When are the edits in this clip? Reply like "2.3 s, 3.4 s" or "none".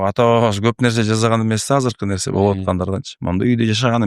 none

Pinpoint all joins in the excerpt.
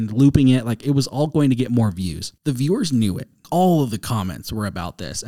2.2 s, 3.4 s

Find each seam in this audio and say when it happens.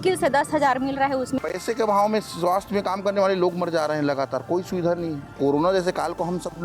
1.4 s, 5.4 s

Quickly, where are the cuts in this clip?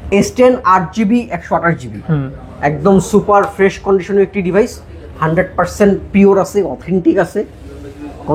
none

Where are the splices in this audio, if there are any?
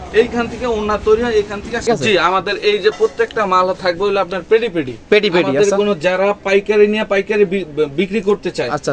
1.9 s

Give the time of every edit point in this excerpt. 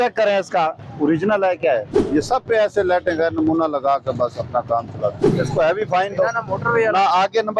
1.8 s, 5.2 s

